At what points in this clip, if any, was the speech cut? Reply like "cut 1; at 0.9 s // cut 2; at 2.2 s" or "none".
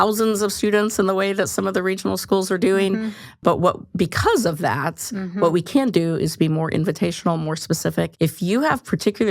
cut 1; at 3.4 s // cut 2; at 8.1 s